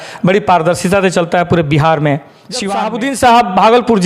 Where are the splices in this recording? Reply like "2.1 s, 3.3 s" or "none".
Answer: 2.6 s